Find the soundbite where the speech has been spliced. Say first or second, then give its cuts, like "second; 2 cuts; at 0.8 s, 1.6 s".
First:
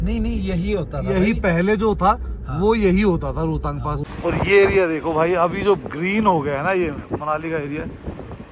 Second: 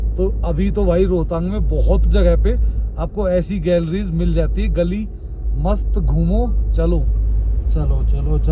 first; 1 cut; at 4.1 s